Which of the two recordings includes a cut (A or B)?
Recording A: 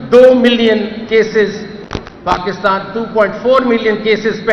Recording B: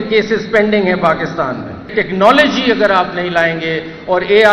B